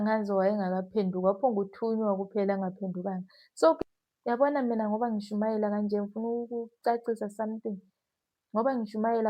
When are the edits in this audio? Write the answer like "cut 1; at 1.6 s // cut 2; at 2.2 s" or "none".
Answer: cut 1; at 3.8 s